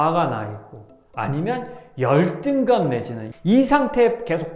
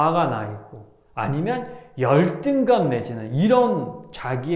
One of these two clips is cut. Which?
first; 1 cut; at 3.2 s

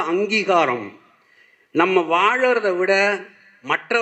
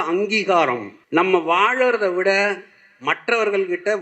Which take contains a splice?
second; 1 cut; at 0.9 s

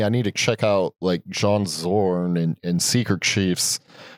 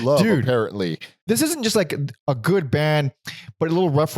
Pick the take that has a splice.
second; 1 cut; at 1.1 s

